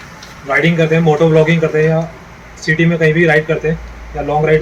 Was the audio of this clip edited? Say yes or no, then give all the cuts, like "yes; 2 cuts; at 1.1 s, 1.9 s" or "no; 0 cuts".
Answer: no; 0 cuts